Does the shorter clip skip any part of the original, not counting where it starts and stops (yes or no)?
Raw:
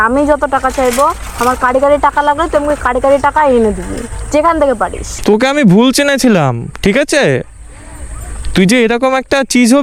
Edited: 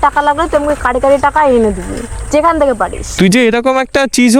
yes